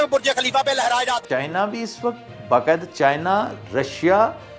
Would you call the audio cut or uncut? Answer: cut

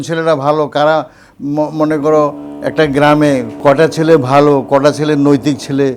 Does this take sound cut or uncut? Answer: cut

